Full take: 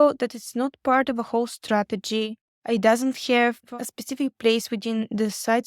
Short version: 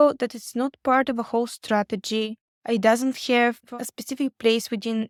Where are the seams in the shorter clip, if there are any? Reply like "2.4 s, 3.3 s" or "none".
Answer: none